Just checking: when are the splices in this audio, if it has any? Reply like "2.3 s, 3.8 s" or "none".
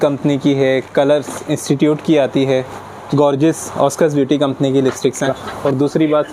5.4 s